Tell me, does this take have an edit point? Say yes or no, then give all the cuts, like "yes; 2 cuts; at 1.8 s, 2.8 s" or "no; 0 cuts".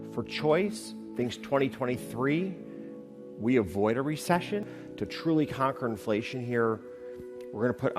yes; 1 cut; at 4.8 s